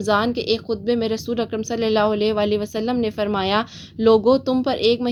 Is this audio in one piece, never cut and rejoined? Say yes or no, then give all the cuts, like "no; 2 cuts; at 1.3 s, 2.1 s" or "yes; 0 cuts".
yes; 0 cuts